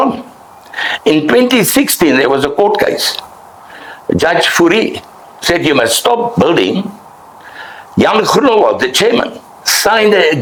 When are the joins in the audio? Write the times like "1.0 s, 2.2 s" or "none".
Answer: none